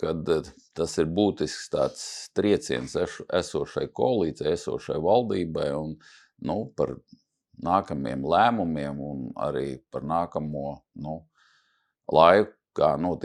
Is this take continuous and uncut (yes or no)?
yes